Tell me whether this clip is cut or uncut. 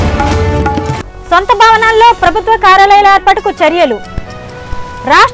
uncut